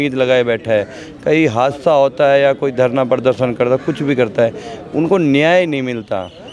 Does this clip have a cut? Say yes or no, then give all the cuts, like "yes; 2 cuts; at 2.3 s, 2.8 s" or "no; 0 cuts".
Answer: no; 0 cuts